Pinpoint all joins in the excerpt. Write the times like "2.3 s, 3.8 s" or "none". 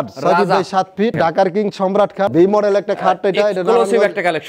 1.2 s, 2.3 s